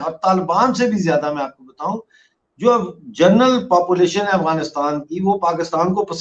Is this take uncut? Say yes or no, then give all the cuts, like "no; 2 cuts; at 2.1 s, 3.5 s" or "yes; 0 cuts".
yes; 0 cuts